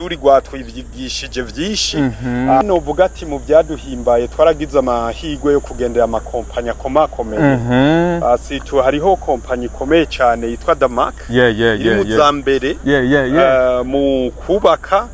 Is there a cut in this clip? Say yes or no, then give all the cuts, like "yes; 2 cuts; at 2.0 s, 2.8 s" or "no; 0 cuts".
yes; 1 cut; at 2.6 s